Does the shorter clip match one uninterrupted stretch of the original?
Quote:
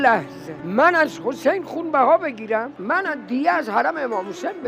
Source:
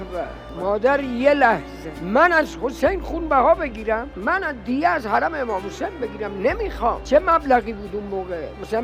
yes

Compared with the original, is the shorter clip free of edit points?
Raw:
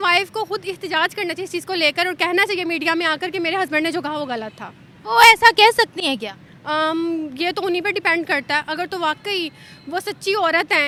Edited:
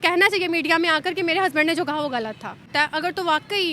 no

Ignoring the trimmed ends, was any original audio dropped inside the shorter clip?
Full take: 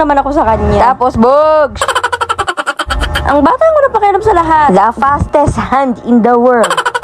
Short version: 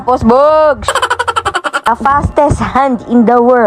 yes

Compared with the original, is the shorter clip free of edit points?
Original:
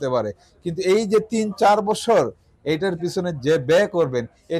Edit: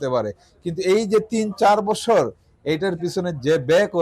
yes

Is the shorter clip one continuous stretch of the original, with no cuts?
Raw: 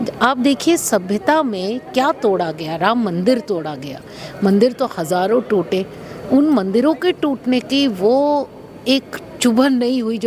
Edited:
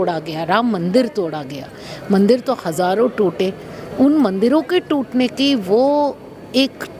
yes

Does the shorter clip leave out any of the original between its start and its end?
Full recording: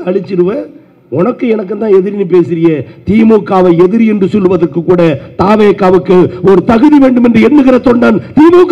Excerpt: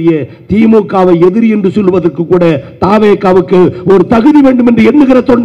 no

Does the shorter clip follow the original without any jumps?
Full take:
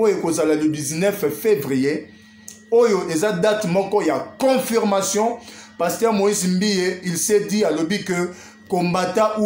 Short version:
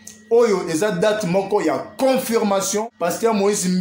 no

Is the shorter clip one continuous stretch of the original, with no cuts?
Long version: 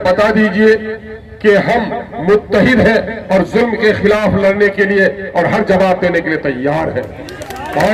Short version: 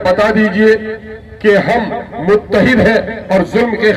yes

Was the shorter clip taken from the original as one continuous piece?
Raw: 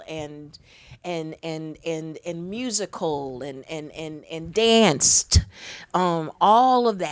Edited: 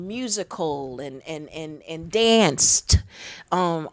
yes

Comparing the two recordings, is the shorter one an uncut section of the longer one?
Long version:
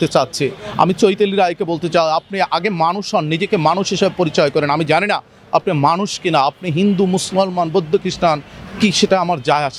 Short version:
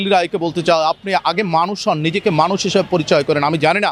yes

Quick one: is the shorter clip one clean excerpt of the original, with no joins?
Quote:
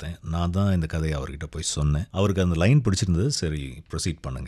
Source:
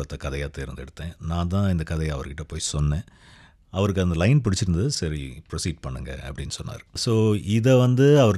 no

